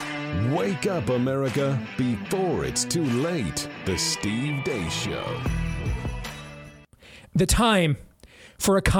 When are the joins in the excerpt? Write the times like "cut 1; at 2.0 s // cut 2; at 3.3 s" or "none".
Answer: cut 1; at 6.5 s